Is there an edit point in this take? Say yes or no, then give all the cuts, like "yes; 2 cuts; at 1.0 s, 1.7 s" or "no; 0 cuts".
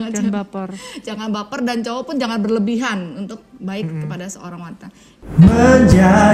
yes; 1 cut; at 5.2 s